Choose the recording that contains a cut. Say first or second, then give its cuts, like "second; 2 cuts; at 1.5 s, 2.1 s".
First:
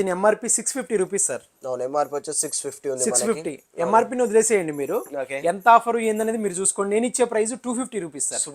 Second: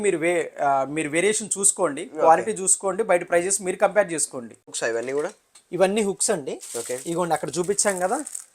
second; 1 cut; at 4.7 s